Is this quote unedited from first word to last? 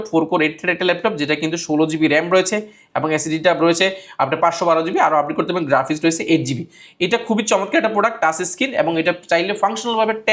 yes; 0 cuts

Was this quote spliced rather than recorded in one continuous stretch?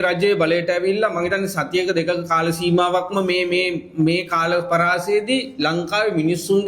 no; 0 cuts

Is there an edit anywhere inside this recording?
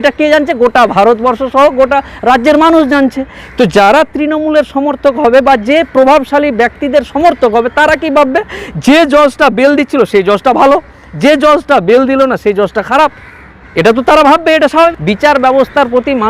yes; 1 cut; at 15.0 s

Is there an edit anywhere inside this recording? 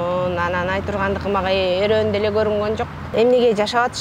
yes; 1 cut; at 3.0 s

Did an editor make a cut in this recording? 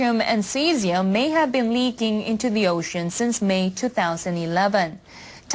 no; 0 cuts

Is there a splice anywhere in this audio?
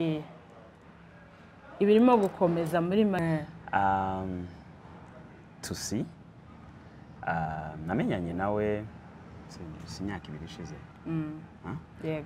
yes; 1 cut; at 3.2 s

